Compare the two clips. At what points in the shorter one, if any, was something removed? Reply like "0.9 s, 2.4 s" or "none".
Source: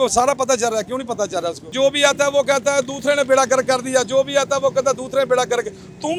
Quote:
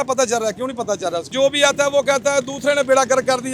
1.2 s